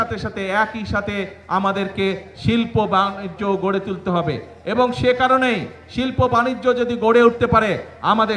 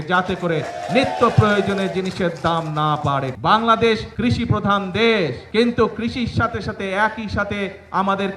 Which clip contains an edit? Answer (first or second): second